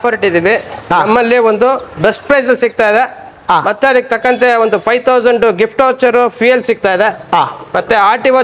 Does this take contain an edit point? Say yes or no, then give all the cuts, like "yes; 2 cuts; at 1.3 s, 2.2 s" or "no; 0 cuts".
no; 0 cuts